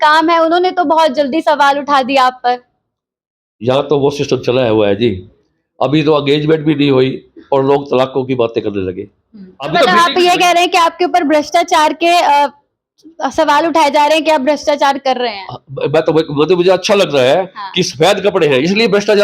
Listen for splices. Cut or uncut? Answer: cut